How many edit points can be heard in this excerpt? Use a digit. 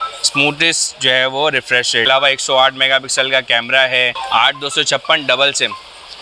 2